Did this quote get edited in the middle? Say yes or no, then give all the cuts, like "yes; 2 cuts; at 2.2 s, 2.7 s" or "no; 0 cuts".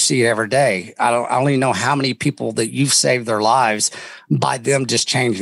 no; 0 cuts